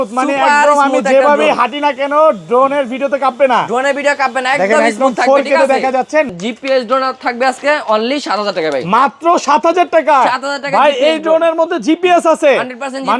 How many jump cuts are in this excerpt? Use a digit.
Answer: 1